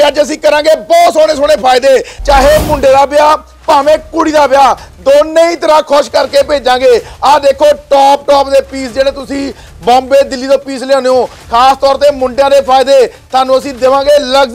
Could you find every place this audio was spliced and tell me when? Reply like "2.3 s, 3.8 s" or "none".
2.1 s